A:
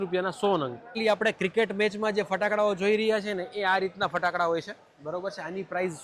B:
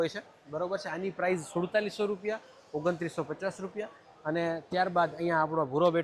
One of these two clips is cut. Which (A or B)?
A